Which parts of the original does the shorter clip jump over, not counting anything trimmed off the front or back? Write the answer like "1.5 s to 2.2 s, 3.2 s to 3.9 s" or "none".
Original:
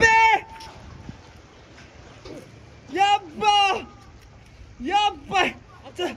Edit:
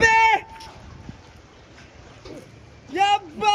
none